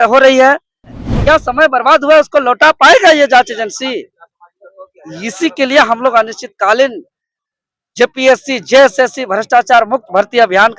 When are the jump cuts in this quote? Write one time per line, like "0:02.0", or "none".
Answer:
0:01.0

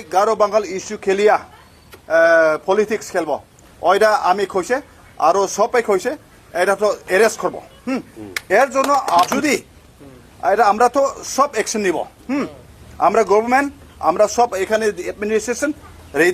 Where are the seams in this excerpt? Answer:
0:09.3

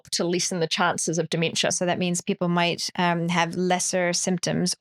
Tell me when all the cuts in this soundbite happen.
0:01.8

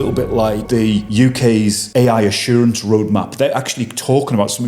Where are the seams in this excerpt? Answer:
0:01.0
0:01.8

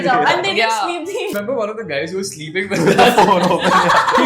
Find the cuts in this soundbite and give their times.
0:01.3

